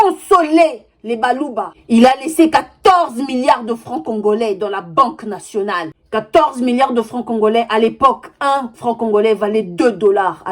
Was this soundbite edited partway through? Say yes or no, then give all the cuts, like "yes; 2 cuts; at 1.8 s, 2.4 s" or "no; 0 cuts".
yes; 1 cut; at 1.8 s